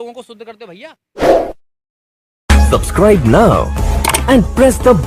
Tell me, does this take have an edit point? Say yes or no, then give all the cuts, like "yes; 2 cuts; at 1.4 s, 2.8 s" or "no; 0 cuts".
yes; 1 cut; at 1.0 s